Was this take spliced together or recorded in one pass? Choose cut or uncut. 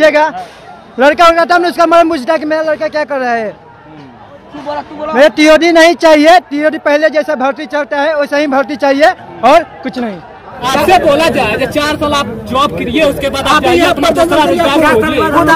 cut